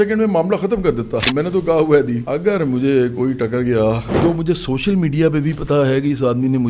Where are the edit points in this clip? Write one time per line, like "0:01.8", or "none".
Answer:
0:01.3
0:02.2
0:04.1